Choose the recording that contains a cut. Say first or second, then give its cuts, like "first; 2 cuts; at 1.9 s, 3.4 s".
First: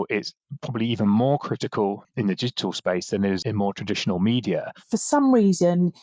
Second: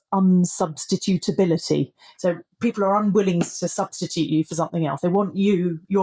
first; 3 cuts; at 2.1 s, 3.4 s, 4.7 s